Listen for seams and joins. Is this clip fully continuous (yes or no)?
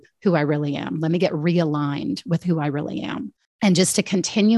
no